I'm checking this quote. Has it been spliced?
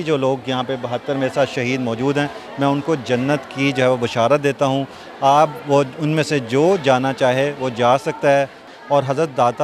yes; 1 cut; at 8.6 s

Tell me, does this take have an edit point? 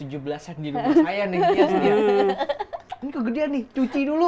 no; 0 cuts

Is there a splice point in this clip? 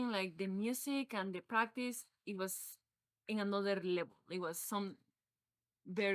no; 0 cuts

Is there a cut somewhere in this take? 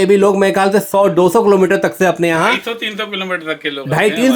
no; 0 cuts

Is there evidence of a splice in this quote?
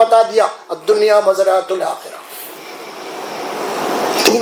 no; 0 cuts

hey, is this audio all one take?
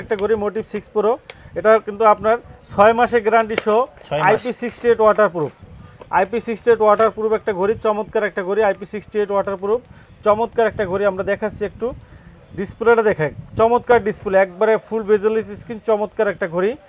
yes; 0 cuts

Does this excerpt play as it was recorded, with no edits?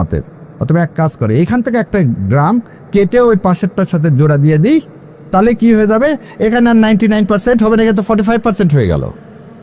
yes; 0 cuts

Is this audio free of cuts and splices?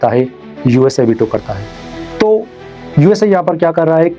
yes; 0 cuts

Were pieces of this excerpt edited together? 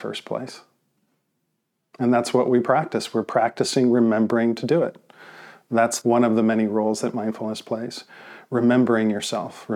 yes; 1 cut; at 6.0 s

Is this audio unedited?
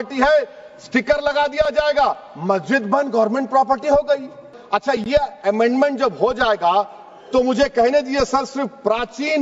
no; 1 cut; at 4.6 s

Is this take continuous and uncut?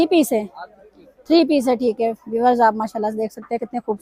yes; 0 cuts

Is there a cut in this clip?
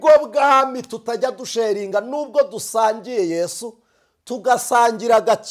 no; 0 cuts

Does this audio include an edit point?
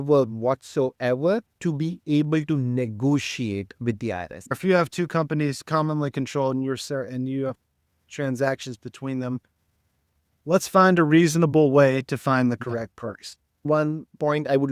yes; 3 cuts; at 1.5 s, 4.6 s, 13.6 s

